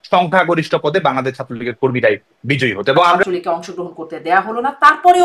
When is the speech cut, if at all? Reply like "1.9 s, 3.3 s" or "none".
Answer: 3.2 s